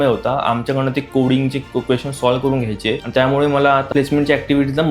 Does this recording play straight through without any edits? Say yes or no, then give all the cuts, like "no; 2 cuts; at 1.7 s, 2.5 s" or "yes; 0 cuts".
no; 2 cuts; at 3.0 s, 3.9 s